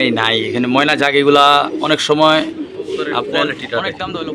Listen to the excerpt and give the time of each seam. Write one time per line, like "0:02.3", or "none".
0:03.2